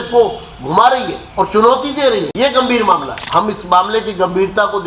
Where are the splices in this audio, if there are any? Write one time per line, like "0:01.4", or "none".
0:01.2
0:02.3
0:03.2